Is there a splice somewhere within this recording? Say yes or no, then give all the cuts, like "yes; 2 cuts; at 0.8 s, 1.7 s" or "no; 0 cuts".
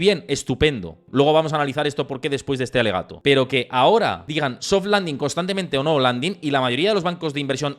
yes; 3 cuts; at 0.9 s, 3.1 s, 4.2 s